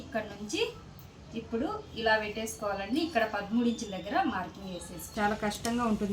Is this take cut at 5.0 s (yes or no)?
yes